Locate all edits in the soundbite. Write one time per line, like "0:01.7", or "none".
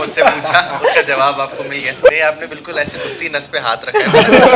0:02.1

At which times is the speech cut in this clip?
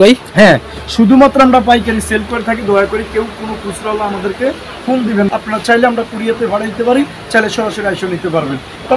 none

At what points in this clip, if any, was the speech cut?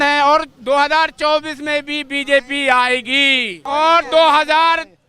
0:03.6

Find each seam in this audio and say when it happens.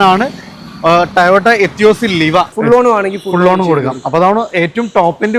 0:02.5

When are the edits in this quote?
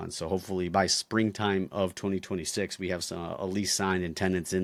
none

